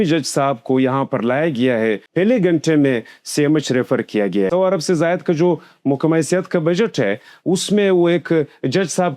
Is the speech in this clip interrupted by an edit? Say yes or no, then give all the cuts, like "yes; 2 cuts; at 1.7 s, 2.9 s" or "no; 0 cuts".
yes; 2 cuts; at 2.0 s, 4.5 s